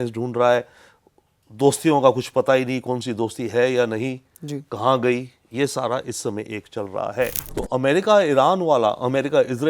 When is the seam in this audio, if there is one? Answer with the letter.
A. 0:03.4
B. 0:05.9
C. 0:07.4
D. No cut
C